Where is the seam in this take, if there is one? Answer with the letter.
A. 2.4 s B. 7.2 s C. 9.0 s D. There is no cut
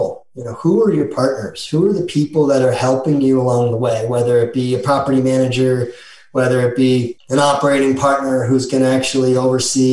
B